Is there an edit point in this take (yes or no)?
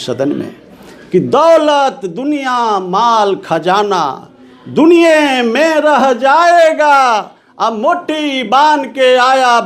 no